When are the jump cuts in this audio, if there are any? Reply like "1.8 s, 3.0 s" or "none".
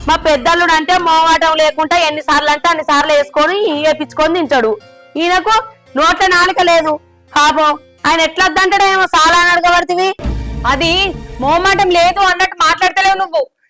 none